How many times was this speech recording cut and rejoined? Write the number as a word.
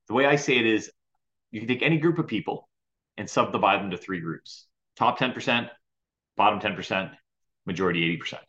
one